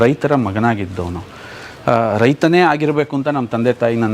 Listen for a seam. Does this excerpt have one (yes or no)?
no